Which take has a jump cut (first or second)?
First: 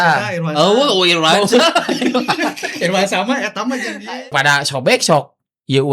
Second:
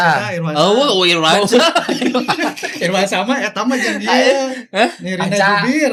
first